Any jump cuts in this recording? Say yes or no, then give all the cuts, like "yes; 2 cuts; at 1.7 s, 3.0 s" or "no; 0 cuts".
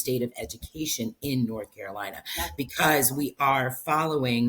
no; 0 cuts